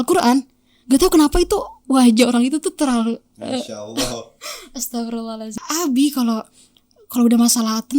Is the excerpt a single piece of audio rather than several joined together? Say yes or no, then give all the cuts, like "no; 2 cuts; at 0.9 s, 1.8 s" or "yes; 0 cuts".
no; 1 cut; at 5.4 s